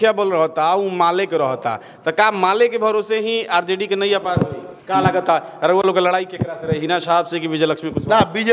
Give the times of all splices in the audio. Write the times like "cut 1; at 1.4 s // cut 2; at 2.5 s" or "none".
cut 1; at 4.6 s